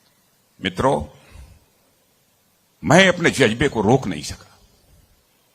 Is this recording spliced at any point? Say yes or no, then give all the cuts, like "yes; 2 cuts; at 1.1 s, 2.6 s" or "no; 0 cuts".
yes; 1 cut; at 2.1 s